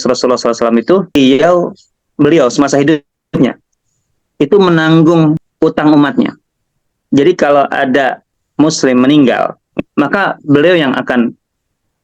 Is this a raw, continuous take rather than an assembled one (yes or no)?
no